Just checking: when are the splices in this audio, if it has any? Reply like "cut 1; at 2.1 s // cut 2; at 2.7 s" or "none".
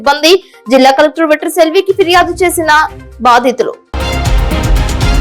cut 1; at 3.8 s